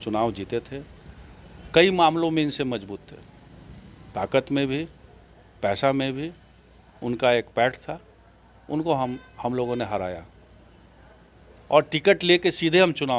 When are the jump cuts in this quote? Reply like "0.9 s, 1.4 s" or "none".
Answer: none